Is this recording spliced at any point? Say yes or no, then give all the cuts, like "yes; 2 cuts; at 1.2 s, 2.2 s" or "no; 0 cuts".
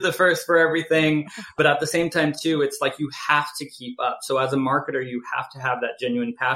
yes; 1 cut; at 1.5 s